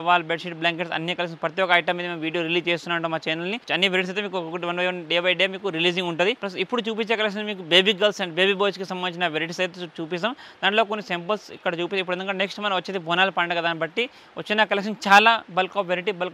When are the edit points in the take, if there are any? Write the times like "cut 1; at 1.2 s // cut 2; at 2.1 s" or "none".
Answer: cut 1; at 3.6 s // cut 2; at 6.5 s

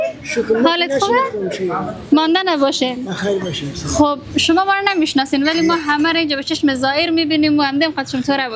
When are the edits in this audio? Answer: none

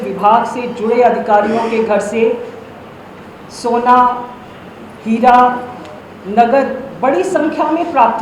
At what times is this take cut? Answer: none

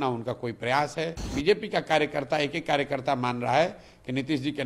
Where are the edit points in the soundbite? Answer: cut 1; at 1.2 s

